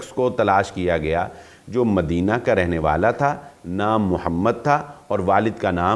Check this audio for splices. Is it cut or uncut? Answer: uncut